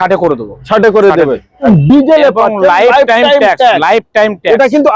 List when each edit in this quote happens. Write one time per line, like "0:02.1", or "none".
0:01.6